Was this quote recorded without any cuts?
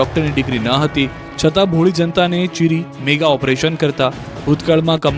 no; 1 cut; at 1.7 s

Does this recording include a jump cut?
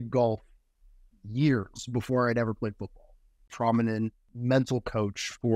yes; 2 cuts; at 3.5 s, 4.3 s

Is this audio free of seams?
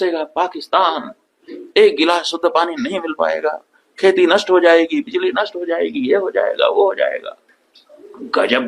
yes; 0 cuts

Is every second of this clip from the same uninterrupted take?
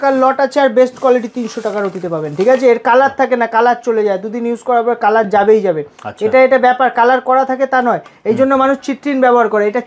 yes; 0 cuts

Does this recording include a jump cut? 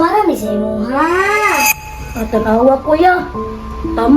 yes; 1 cut; at 1.7 s

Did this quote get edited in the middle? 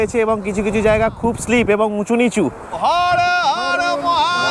yes; 1 cut; at 2.7 s

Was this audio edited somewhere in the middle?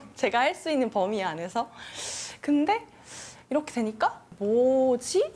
yes; 1 cut; at 4.2 s

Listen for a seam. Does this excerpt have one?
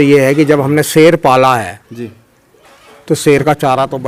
no; 0 cuts

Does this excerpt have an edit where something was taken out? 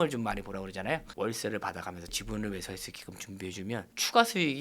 yes; 1 cut; at 1.1 s

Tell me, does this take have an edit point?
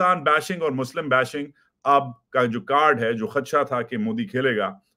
no; 0 cuts

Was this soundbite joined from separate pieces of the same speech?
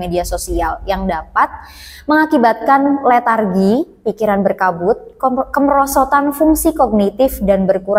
no; 0 cuts

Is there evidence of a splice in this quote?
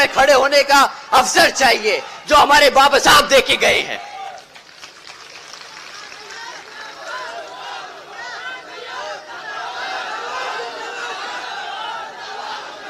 no; 0 cuts

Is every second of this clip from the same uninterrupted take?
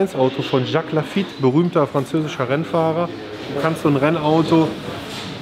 no; 2 cuts; at 1.3 s, 3.5 s

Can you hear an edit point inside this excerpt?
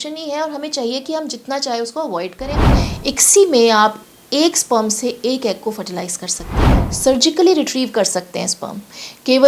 yes; 2 cuts; at 2.9 s, 6.8 s

